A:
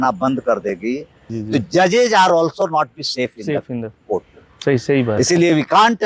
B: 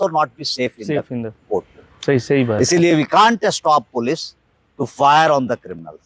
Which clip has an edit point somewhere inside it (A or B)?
A